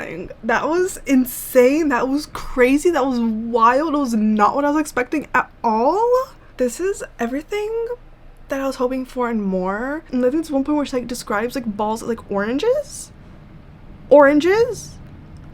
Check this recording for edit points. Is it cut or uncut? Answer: cut